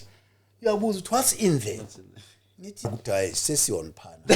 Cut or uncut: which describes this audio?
cut